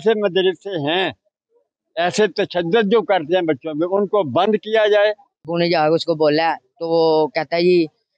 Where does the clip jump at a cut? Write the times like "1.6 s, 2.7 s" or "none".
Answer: 5.3 s